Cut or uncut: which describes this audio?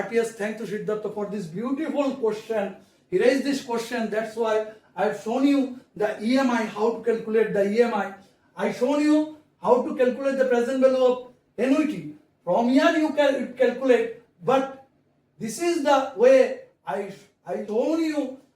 cut